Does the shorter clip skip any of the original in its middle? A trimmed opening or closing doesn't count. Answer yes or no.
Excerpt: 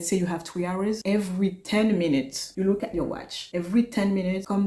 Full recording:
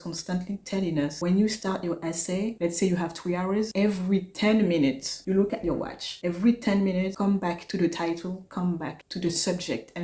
no